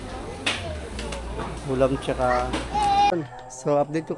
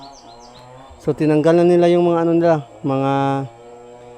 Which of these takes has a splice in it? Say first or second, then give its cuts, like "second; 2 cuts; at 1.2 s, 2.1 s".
first; 1 cut; at 3.1 s